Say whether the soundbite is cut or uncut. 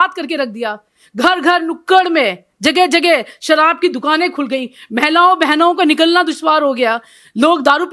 uncut